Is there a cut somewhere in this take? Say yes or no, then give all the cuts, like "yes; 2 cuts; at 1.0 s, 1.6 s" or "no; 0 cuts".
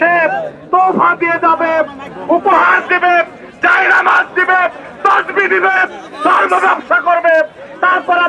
no; 0 cuts